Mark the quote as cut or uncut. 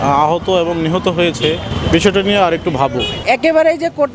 cut